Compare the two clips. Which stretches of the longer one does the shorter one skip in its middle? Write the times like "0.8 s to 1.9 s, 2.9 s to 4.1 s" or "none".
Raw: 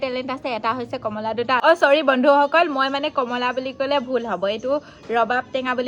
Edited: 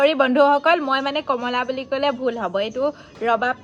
none